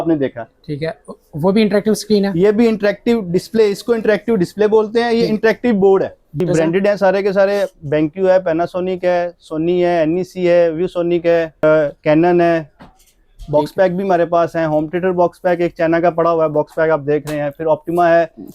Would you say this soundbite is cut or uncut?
cut